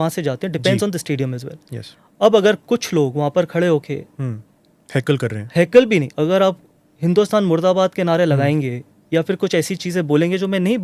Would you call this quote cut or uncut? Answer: uncut